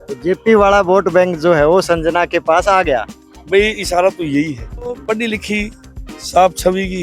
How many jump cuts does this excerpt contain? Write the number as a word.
one